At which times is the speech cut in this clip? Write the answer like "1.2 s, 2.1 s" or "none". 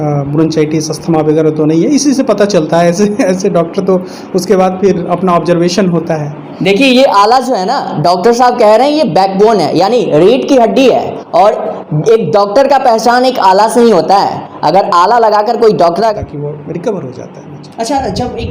16.1 s